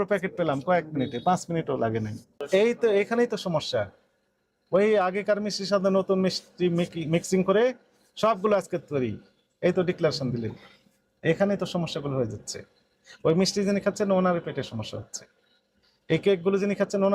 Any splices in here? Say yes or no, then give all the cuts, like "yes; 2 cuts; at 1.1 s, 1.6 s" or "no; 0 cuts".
yes; 1 cut; at 2.4 s